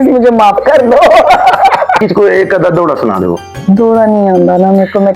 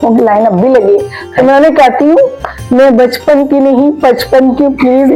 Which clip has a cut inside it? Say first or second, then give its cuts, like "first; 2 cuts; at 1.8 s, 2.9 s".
first; 1 cut; at 2.0 s